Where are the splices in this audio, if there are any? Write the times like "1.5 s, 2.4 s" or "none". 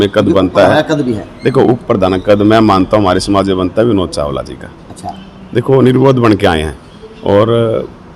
none

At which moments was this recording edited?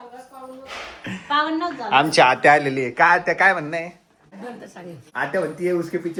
none

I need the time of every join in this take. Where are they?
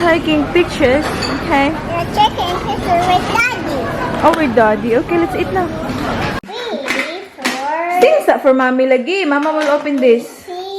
6.5 s

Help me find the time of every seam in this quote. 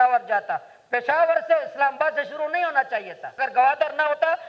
3.4 s

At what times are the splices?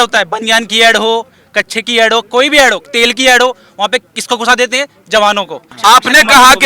5.6 s

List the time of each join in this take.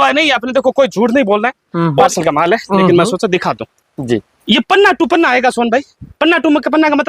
2.1 s

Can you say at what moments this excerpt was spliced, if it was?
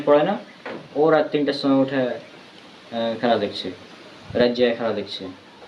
none

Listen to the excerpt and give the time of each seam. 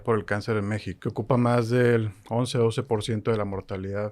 0.9 s

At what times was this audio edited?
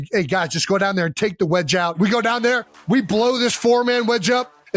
2.0 s

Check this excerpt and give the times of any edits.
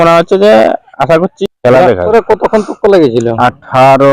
1.4 s, 2.1 s

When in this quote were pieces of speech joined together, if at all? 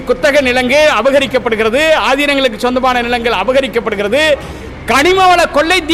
none

